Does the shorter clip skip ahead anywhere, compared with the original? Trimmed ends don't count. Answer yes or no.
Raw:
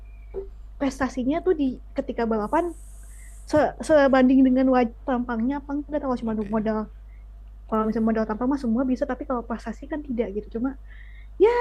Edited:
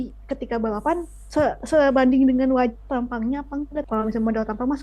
yes